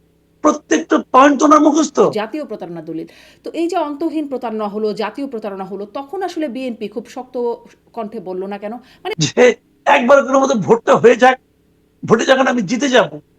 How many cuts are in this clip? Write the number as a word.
two